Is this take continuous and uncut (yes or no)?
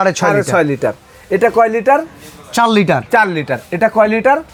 yes